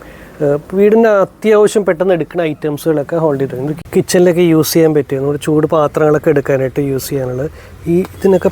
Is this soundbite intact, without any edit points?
no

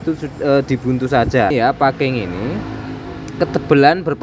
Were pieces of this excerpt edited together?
yes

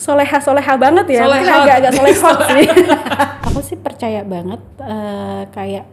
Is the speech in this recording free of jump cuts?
no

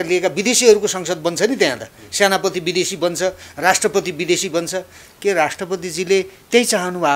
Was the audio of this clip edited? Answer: no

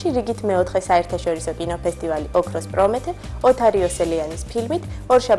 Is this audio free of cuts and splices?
yes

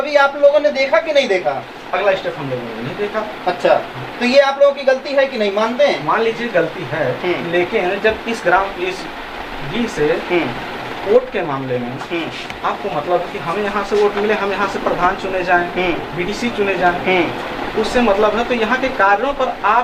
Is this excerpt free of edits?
yes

